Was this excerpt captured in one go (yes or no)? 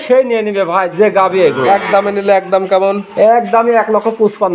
yes